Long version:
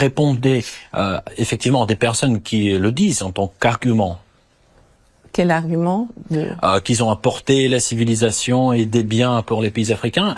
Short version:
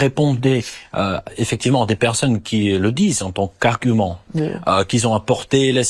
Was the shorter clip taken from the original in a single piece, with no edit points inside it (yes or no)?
no